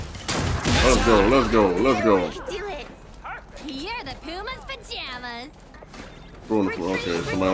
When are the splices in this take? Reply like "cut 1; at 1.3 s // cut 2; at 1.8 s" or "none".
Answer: cut 1; at 5.7 s